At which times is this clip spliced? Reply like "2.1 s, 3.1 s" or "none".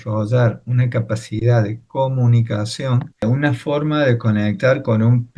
3.2 s